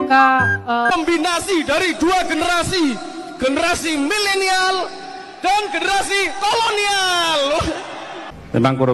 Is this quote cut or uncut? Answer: cut